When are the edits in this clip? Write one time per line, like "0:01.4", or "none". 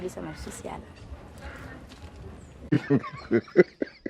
0:02.5